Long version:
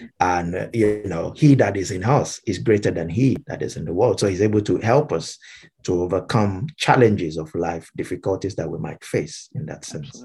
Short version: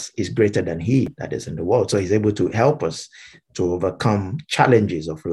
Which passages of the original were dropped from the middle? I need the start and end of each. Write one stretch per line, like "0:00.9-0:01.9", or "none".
none